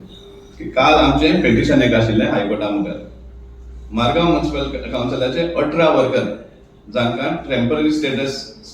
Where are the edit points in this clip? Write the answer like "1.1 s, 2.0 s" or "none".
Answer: none